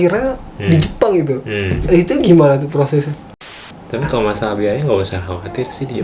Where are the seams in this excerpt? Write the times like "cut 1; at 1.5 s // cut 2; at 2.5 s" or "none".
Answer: cut 1; at 3.5 s